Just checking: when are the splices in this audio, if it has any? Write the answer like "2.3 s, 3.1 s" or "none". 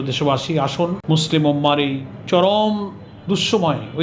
1.0 s, 2.1 s